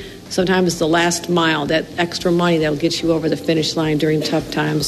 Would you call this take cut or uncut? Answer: uncut